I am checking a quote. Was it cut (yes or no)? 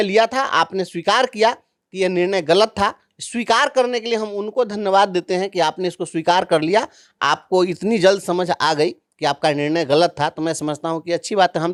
no